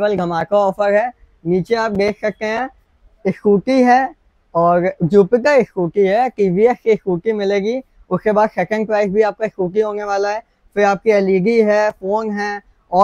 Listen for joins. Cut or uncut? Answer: uncut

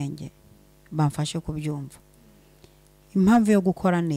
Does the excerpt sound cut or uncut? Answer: uncut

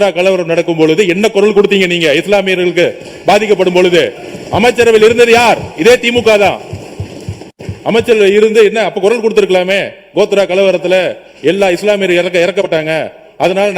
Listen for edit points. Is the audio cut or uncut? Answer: uncut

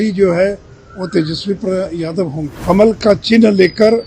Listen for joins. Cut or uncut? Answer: cut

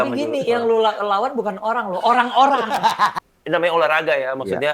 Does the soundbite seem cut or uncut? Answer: cut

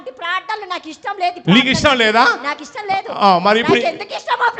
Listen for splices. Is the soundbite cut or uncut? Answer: uncut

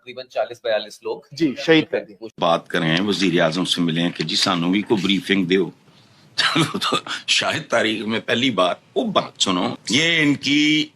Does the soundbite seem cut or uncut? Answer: cut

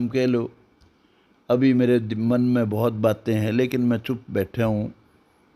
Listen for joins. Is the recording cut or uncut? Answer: uncut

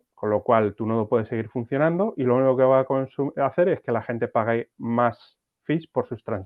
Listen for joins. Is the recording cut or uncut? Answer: uncut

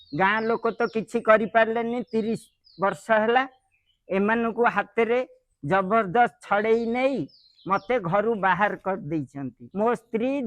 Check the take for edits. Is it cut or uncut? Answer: cut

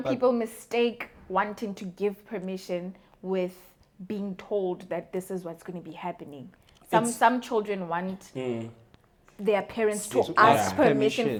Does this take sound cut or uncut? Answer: uncut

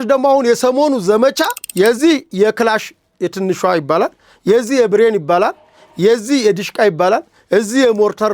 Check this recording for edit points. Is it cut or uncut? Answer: cut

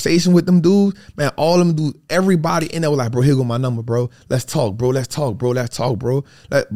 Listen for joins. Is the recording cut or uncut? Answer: uncut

